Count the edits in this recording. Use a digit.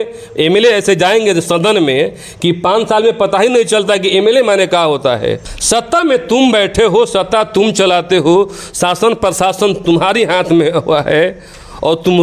1